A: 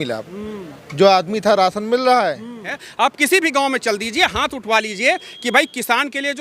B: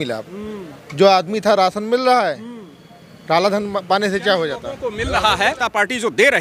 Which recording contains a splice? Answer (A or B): A